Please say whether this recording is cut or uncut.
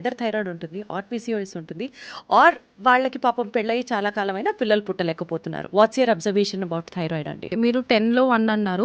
cut